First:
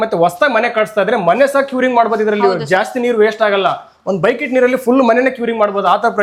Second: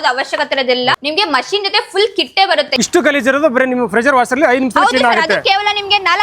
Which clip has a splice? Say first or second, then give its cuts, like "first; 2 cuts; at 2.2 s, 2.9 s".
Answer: second; 2 cuts; at 1.0 s, 2.7 s